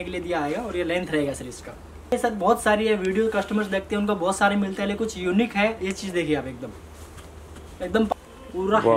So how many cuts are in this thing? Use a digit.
2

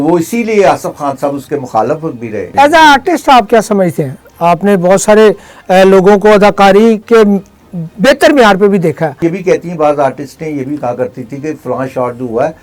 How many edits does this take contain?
2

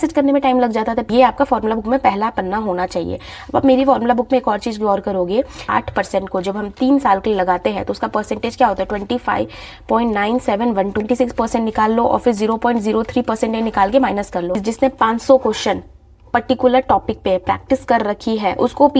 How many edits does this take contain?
4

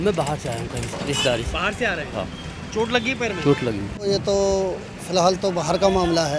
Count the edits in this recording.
1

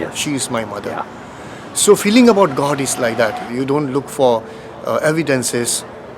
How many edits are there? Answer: 1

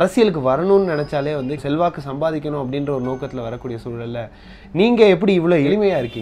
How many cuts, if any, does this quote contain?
1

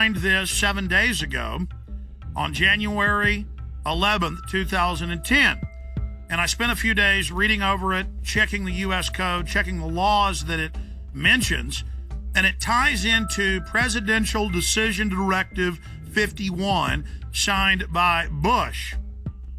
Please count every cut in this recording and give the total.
1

